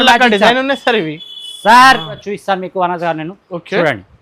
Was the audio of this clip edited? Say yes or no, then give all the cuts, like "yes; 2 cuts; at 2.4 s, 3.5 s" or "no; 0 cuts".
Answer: yes; 1 cut; at 2.2 s